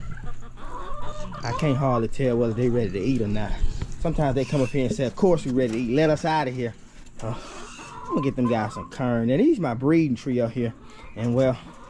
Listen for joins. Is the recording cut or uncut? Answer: uncut